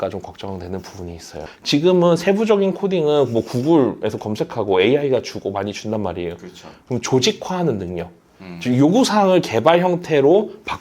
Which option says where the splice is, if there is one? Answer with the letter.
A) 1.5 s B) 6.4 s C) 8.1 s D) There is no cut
A